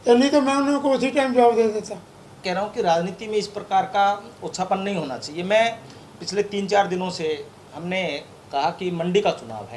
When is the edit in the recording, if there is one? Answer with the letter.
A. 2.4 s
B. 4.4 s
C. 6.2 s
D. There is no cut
A